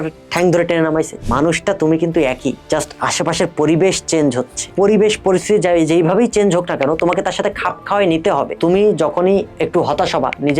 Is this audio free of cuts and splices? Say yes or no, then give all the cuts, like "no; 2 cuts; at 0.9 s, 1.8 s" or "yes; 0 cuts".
no; 4 cuts; at 1.2 s, 4.6 s, 8.5 s, 9.5 s